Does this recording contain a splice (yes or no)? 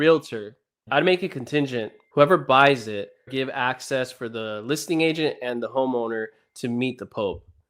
yes